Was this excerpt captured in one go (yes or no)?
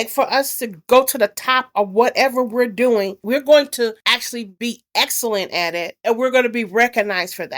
yes